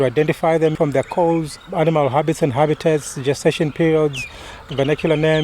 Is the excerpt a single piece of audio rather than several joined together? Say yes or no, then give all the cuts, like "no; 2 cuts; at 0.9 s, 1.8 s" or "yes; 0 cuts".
no; 1 cut; at 1.0 s